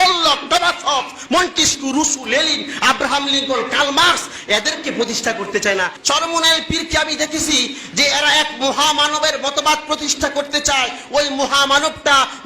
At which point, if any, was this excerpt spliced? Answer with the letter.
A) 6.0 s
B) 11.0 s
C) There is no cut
A